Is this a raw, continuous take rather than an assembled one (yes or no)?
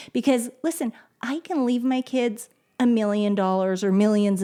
yes